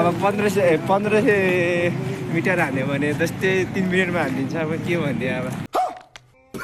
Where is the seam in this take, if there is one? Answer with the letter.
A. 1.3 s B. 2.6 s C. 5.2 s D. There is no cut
D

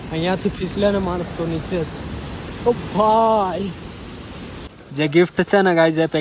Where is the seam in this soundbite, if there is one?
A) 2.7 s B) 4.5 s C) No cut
B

